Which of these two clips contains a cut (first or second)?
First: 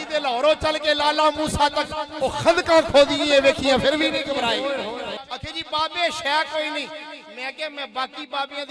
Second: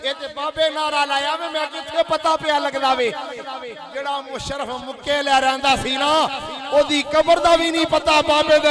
first